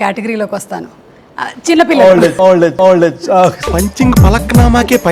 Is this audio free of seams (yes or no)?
yes